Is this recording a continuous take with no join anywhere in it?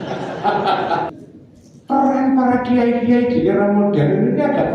no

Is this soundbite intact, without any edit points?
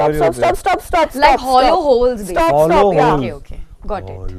yes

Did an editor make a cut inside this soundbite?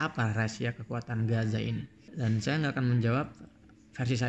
yes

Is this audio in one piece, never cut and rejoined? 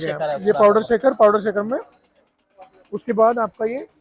yes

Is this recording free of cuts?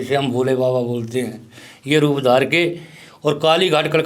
yes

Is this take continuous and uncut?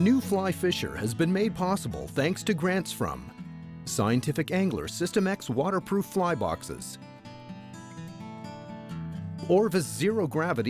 yes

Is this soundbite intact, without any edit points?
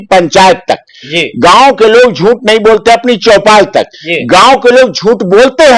yes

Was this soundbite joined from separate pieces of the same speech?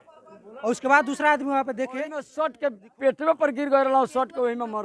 yes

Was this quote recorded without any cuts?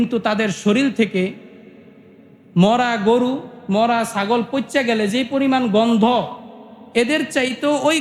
yes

